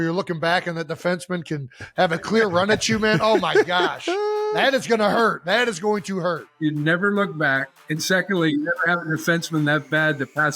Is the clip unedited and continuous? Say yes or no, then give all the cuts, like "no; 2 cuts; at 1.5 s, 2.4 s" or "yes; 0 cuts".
no; 1 cut; at 6.5 s